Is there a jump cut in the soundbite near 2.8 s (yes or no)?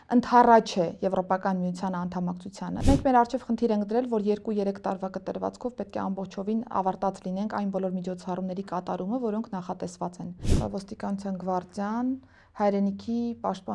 yes